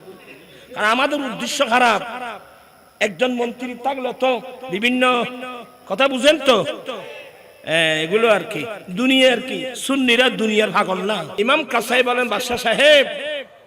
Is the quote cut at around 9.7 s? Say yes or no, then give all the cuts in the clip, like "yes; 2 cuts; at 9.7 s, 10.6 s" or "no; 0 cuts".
yes; 3 cuts; at 4.6 s, 9.7 s, 11.3 s